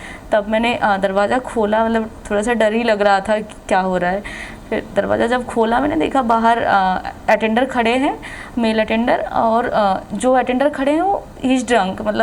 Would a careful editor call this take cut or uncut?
uncut